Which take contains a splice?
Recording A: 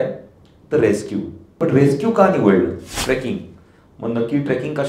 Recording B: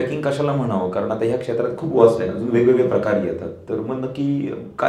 A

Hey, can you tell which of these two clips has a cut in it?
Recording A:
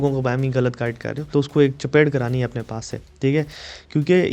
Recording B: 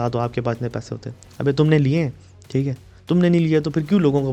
A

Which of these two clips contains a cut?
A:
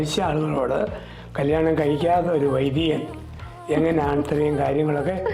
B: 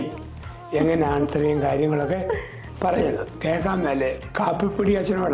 B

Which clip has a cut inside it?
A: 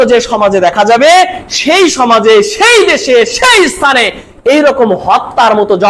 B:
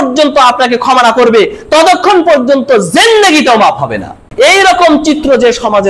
B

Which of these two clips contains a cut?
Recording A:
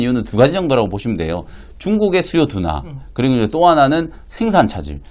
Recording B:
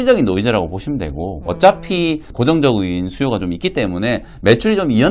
B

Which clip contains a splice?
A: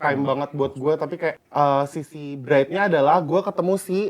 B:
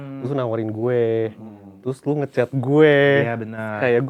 A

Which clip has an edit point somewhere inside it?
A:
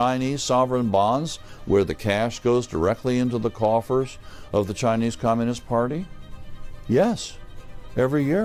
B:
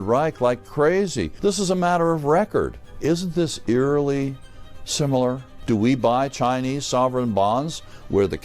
B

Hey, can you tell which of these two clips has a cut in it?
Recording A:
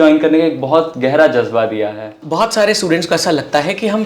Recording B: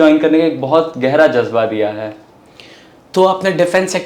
A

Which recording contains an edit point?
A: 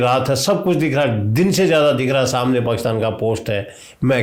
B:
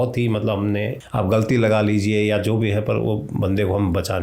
B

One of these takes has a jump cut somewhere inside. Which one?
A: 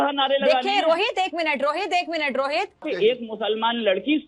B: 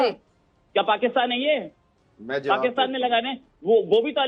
A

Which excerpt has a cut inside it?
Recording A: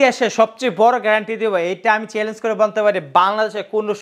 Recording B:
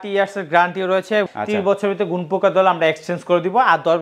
B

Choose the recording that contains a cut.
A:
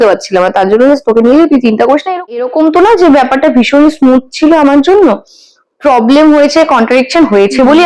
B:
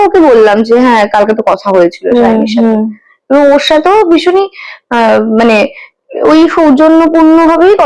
A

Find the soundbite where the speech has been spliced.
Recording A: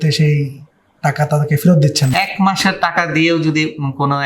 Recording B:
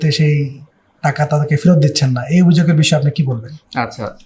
A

